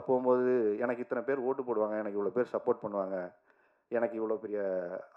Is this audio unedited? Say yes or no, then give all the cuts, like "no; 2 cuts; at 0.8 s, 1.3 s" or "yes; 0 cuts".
yes; 0 cuts